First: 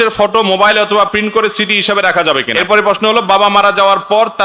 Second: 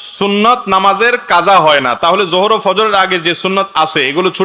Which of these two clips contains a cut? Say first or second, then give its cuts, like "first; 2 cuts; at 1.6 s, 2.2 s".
first; 1 cut; at 2.5 s